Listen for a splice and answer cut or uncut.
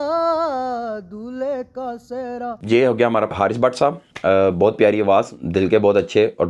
uncut